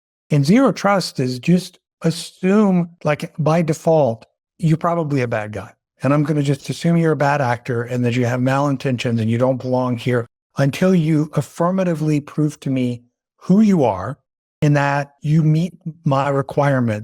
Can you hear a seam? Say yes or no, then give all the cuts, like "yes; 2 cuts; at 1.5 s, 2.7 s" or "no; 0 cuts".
no; 0 cuts